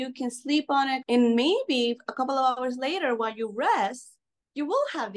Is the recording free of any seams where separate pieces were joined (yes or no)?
no